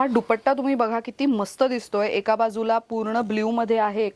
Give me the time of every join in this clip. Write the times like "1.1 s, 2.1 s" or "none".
none